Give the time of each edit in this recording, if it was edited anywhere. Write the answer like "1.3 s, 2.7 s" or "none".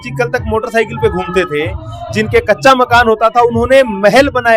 none